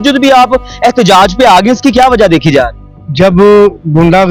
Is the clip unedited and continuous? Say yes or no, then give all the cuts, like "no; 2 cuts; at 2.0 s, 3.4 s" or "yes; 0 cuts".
yes; 0 cuts